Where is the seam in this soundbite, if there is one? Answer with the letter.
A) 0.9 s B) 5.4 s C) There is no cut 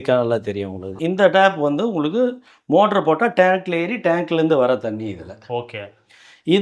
A